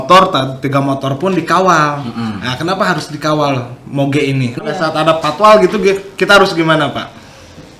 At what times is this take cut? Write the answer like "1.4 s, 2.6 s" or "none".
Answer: 4.6 s